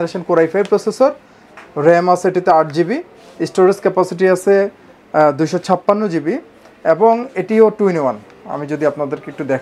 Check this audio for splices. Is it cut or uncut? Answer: uncut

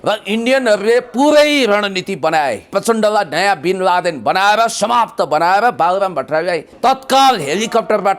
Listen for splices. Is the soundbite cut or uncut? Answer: cut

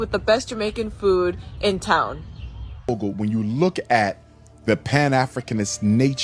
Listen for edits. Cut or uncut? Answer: cut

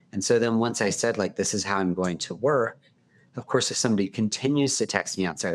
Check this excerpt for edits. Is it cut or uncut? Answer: uncut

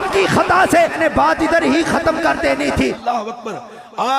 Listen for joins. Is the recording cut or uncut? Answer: cut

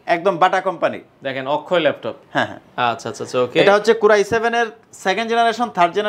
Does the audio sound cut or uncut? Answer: uncut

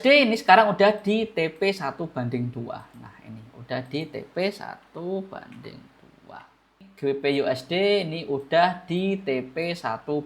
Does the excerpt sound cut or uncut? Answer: cut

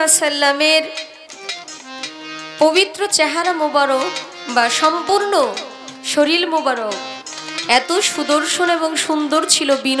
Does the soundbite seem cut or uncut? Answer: uncut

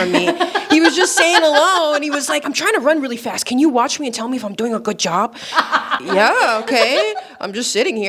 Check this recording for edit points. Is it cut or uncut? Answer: cut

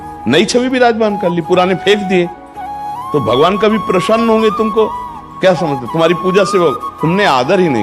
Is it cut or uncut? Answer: uncut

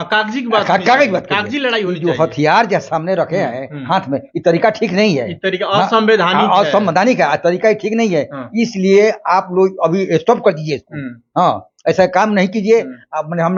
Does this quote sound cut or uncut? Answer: uncut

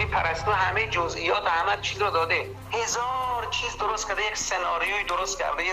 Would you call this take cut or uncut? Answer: cut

